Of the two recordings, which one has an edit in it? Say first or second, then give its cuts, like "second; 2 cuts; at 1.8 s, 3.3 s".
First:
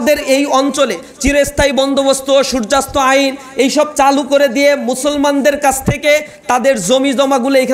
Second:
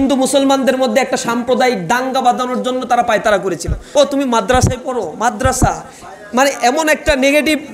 second; 1 cut; at 3.8 s